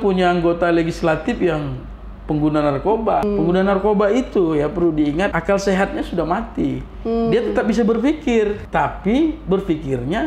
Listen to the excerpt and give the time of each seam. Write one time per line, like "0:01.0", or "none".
0:03.2
0:05.4
0:08.6